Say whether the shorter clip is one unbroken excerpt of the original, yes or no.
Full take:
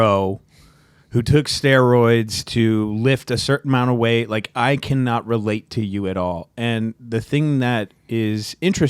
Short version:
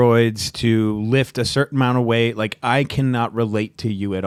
yes